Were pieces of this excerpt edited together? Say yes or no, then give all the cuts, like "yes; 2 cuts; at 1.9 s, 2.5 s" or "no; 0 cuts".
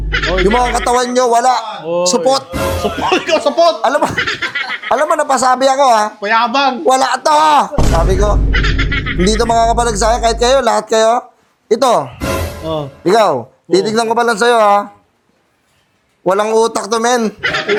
no; 0 cuts